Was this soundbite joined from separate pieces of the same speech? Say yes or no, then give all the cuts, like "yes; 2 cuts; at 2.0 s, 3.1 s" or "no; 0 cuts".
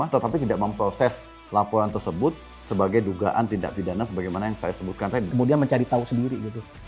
yes; 1 cut; at 5.3 s